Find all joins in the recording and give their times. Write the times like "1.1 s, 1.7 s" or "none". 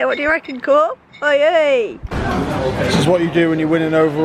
2.1 s